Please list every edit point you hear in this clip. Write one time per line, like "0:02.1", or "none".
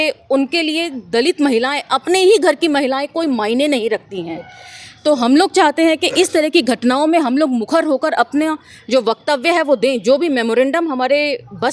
none